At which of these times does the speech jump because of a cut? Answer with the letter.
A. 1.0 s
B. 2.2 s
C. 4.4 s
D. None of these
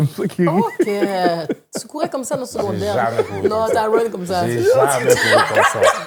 D